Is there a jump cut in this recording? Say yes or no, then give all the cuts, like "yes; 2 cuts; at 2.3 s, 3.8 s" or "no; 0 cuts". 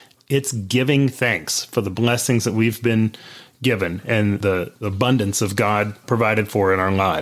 yes; 2 cuts; at 4.4 s, 6.0 s